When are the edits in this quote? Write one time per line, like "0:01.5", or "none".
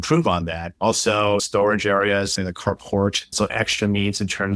0:01.4

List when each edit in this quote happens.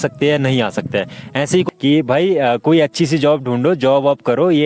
0:01.7

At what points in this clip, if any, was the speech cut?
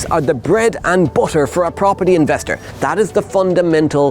0:02.6

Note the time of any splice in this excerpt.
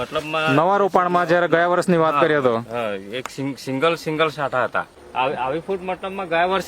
0:04.9

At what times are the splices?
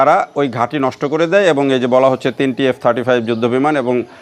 none

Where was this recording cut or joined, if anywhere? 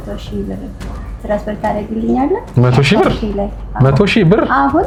none

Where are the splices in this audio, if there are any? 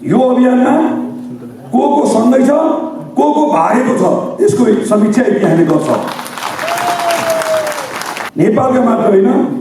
0:08.2

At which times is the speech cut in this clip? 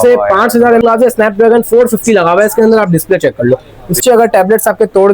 0:00.8
0:04.0

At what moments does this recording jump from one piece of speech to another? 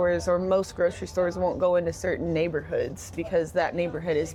none

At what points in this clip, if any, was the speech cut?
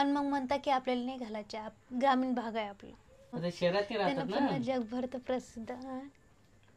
0:03.4

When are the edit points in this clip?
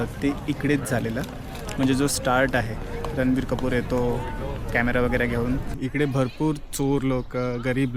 0:05.7

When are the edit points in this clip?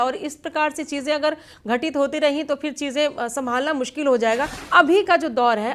0:04.6

